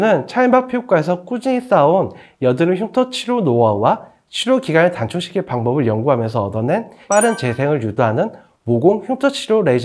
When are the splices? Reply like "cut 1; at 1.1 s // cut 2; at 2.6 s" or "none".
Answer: none